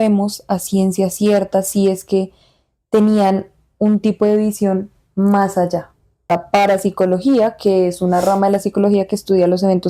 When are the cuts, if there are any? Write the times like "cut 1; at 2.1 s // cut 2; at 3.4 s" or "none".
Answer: cut 1; at 6.3 s